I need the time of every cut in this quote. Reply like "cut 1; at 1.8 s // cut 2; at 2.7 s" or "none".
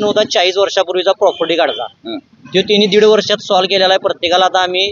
none